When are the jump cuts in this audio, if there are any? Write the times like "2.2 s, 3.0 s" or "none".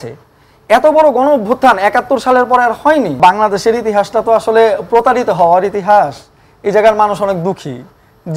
3.1 s